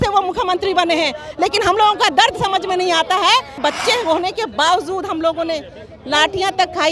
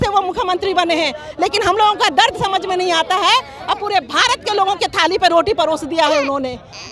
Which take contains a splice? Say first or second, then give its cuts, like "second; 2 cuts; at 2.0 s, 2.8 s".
first; 1 cut; at 3.6 s